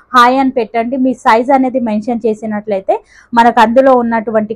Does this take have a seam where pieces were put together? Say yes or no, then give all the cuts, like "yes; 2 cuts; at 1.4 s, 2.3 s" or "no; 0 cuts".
no; 0 cuts